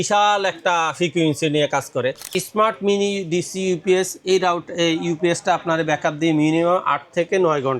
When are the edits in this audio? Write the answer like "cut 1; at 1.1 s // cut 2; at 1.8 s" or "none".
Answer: cut 1; at 2.2 s